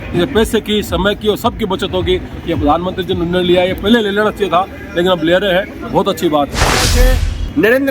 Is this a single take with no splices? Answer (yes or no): no